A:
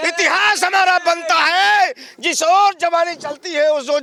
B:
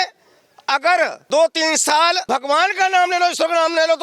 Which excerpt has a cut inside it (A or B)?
B